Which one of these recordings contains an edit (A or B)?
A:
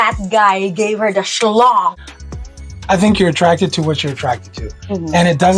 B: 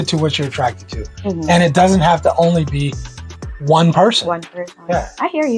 A